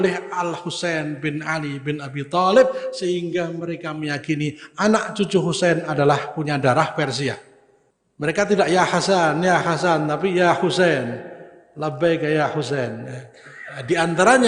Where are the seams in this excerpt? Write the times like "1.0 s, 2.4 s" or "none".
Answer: 7.5 s